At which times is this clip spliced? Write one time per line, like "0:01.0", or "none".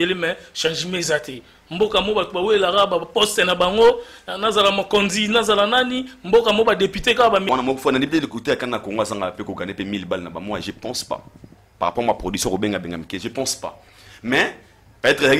0:07.5

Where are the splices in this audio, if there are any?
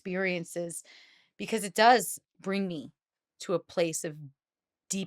0:02.1

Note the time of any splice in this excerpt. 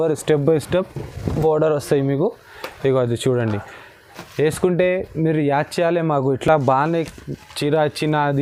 none

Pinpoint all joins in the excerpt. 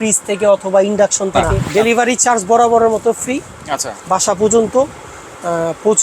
0:01.5

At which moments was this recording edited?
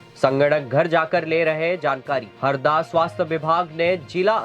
0:02.3

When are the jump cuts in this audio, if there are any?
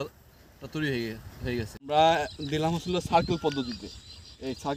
0:01.9

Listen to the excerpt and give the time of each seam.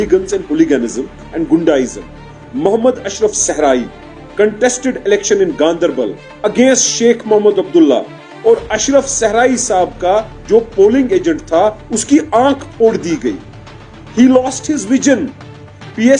none

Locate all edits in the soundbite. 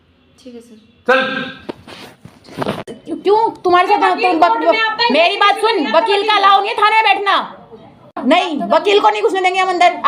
0:02.8
0:08.2

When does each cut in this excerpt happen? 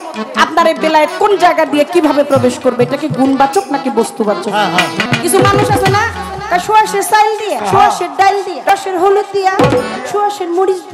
0:05.1
0:07.6
0:08.7

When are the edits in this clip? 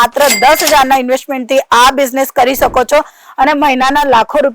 none

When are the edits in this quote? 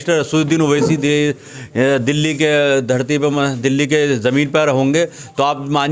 none

